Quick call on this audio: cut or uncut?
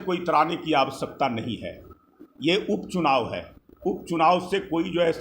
uncut